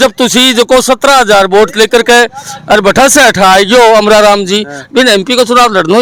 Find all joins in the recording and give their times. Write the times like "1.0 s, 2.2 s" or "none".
none